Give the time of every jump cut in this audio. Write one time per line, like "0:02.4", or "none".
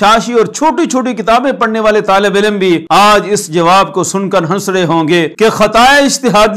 0:02.8
0:05.3